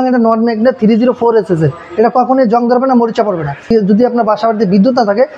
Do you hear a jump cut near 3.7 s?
yes; 1 cut; at 3.7 s

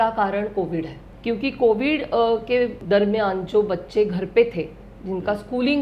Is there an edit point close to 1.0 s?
yes; 2 cuts; at 1.0 s, 2.8 s

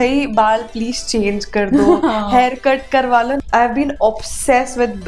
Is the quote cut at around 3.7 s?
yes; 1 cut; at 3.7 s

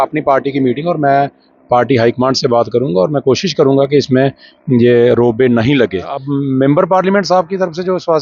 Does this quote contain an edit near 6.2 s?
yes; 1 cut; at 6.2 s

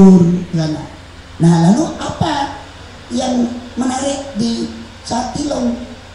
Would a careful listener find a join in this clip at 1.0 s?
no; 0 cuts

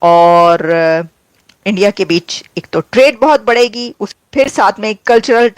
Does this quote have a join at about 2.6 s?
no; 1 cut; at 4.1 s

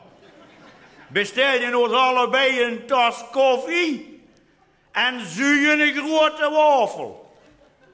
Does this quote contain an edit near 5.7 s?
no; 0 cuts

